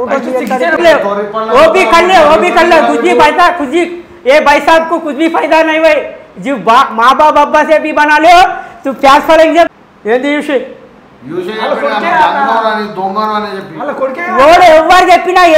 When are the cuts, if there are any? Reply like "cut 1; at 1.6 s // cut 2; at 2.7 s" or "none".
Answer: cut 1; at 0.8 s // cut 2; at 9.7 s